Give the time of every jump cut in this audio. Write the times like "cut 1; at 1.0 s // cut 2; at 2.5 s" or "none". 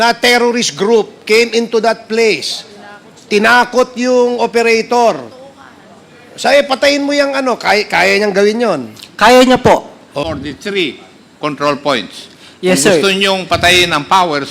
cut 1; at 10.2 s